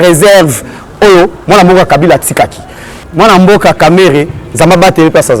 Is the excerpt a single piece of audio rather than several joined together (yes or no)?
no